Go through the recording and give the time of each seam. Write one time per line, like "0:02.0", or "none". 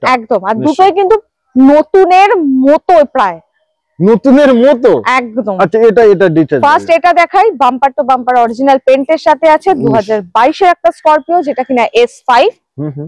none